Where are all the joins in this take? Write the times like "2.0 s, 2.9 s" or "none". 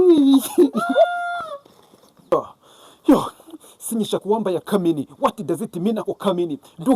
2.3 s

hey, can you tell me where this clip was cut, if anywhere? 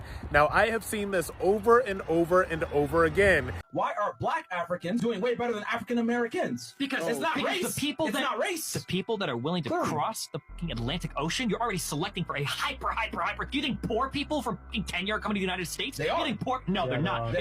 3.7 s

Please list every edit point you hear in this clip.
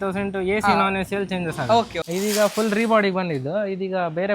2.0 s

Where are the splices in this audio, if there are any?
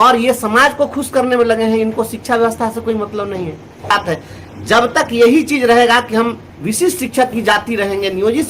3.9 s

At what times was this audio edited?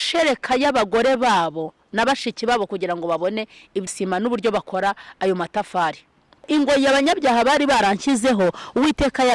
3.9 s, 6.5 s

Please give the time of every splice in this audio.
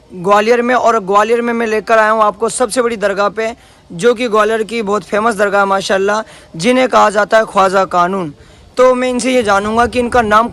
none

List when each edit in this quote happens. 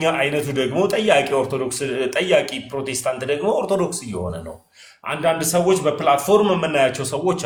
none

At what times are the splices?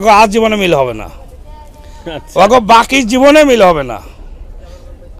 none

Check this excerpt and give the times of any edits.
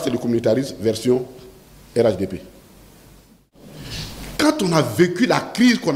3.8 s

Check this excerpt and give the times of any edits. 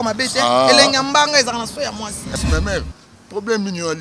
2.2 s

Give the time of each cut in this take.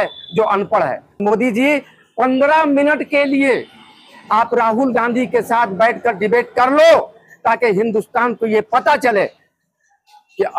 1.2 s

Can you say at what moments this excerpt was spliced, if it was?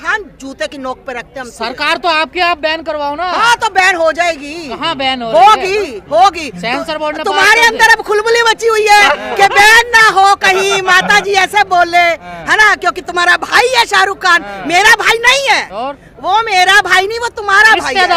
none

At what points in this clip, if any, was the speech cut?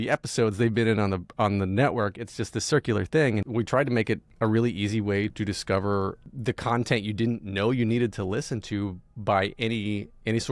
3.9 s, 5.3 s, 6.3 s

